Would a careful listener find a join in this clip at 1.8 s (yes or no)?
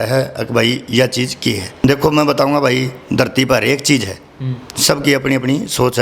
yes